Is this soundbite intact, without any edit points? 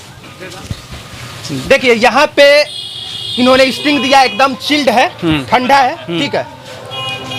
yes; 0 cuts

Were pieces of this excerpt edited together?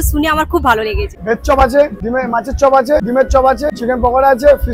yes; 4 cuts; at 1.1 s, 2.0 s, 3.1 s, 3.7 s

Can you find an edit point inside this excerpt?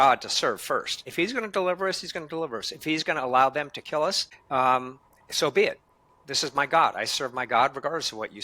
yes; 2 cuts; at 1.0 s, 4.3 s

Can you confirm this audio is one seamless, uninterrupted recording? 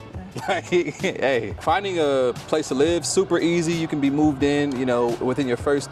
no; 1 cut; at 1.5 s

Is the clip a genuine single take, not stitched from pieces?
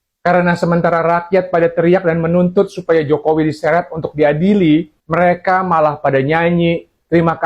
no; 1 cut; at 5.0 s

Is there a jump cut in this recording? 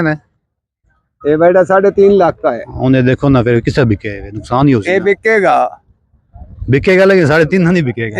no; 0 cuts

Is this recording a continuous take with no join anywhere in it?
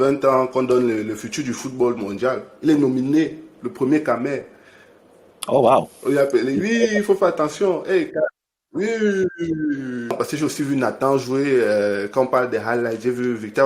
no; 1 cut; at 10.1 s

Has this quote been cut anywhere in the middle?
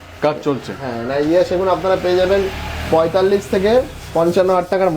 no; 0 cuts

